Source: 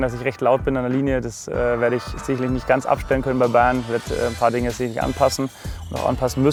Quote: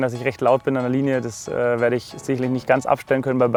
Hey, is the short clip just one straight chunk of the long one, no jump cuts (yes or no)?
yes